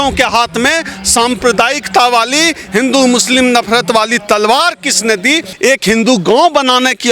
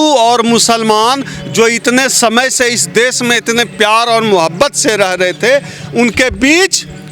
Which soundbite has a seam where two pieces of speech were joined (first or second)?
first